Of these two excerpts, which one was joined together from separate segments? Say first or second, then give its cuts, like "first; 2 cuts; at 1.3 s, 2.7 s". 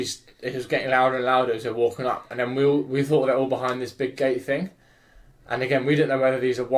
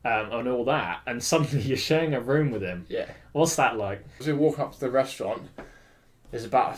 second; 1 cut; at 4.2 s